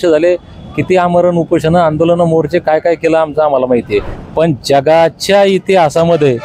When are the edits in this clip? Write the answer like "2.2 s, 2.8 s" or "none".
4.2 s

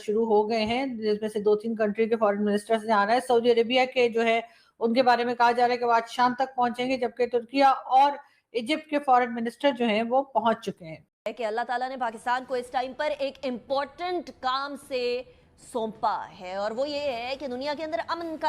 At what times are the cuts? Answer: 11.2 s

